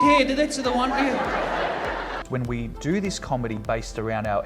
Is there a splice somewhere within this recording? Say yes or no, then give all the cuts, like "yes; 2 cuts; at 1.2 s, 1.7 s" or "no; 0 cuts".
yes; 1 cut; at 2.2 s